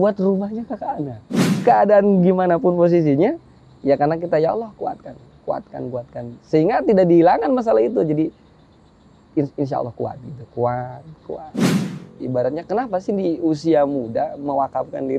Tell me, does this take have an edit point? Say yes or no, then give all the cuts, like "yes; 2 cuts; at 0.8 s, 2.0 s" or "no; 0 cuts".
yes; 2 cuts; at 1.4 s, 11.7 s